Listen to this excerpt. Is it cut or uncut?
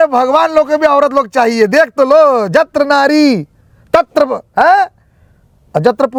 uncut